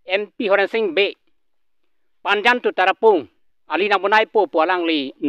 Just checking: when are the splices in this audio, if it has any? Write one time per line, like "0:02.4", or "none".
none